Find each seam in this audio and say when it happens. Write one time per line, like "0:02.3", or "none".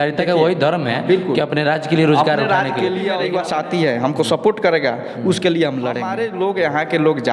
0:03.2
0:06.1